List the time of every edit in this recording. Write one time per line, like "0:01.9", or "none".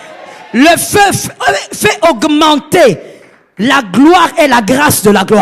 none